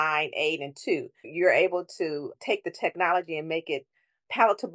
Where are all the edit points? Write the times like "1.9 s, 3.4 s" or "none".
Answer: 1.3 s, 2.3 s